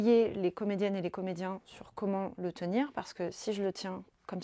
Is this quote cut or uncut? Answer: uncut